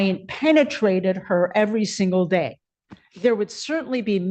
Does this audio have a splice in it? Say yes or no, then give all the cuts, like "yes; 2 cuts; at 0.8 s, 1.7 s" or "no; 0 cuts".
no; 0 cuts